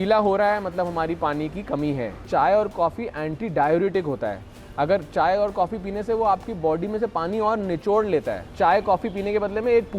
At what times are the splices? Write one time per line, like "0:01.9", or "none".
0:02.2
0:08.4